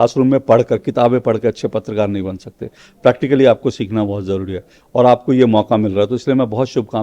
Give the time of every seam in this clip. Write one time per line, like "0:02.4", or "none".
none